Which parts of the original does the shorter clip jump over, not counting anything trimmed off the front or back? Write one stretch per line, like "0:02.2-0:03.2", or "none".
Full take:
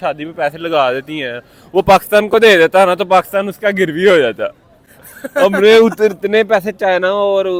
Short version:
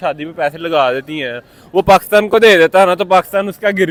none